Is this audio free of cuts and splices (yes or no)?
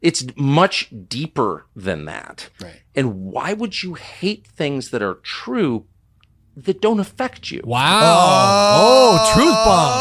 yes